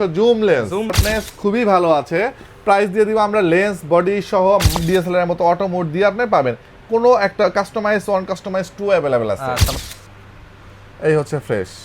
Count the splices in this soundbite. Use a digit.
3